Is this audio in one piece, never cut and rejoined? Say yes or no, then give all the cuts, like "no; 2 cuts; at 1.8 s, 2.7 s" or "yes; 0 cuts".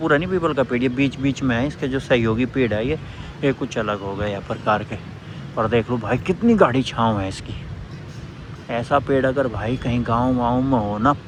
yes; 0 cuts